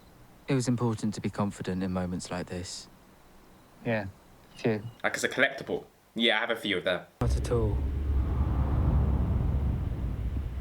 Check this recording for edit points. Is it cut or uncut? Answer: cut